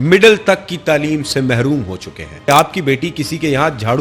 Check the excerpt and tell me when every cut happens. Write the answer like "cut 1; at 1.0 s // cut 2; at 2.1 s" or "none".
cut 1; at 2.5 s